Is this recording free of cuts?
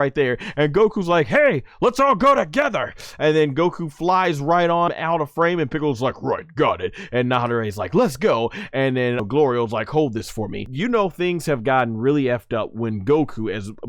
no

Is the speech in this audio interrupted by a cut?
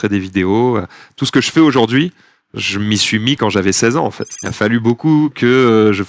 yes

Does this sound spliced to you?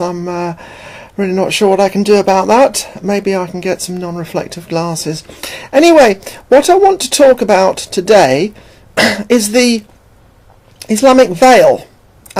yes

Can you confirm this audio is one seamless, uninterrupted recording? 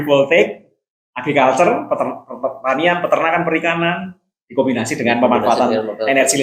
yes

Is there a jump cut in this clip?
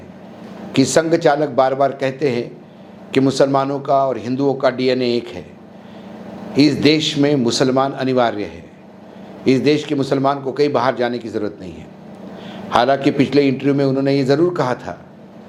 no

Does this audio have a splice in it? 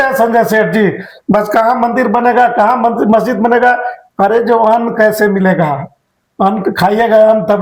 no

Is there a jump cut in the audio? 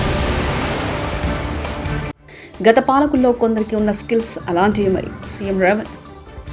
yes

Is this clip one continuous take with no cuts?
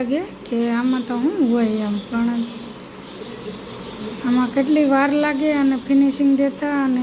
yes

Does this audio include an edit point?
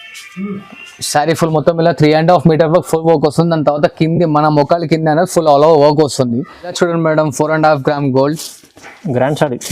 yes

